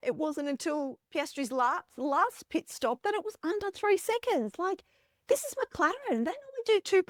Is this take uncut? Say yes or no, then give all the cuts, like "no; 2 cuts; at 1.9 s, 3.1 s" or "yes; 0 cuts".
yes; 0 cuts